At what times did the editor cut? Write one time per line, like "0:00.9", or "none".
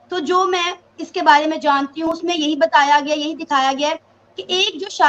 0:02.1